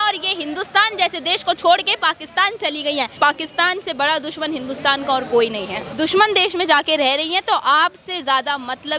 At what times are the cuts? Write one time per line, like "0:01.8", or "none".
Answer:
0:03.1
0:05.8